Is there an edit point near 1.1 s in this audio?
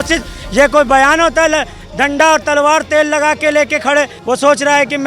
no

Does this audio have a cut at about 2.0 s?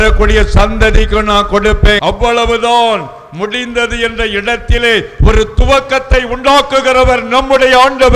yes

